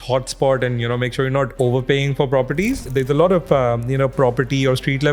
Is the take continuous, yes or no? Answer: no